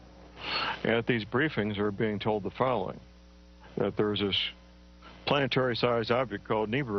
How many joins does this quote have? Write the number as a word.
one